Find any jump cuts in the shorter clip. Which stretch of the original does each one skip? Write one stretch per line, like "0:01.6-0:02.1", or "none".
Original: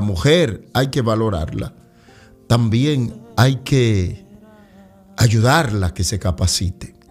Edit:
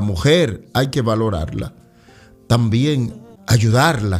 0:03.2-0:04.9

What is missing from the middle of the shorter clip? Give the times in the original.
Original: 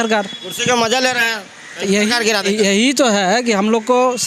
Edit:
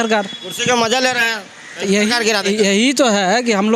none

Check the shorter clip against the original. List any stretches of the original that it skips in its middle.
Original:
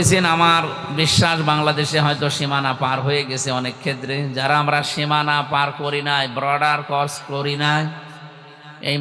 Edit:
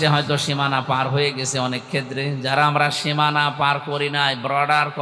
none

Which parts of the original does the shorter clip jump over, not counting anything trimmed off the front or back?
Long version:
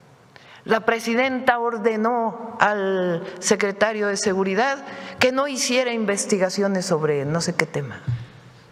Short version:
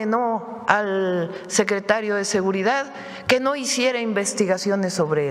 none

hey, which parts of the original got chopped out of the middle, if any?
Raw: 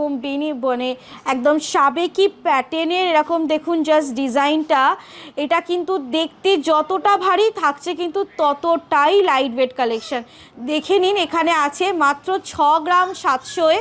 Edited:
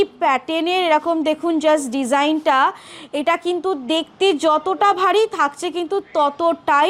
none

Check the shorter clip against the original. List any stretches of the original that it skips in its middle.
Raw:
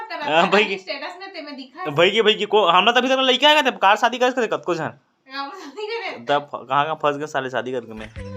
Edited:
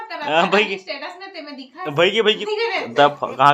0:02.4-0:05.7

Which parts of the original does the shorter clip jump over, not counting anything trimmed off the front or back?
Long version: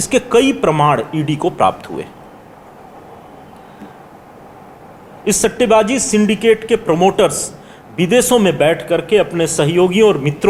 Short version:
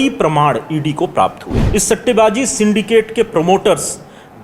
0:01.9-0:05.0

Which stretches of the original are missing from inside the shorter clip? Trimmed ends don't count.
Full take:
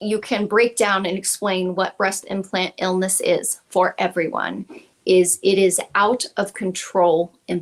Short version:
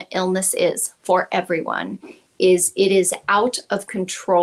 none

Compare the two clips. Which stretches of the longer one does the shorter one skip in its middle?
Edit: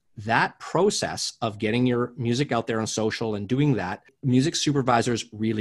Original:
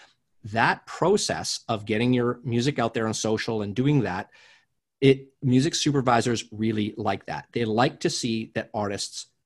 0:04.4-0:05.3

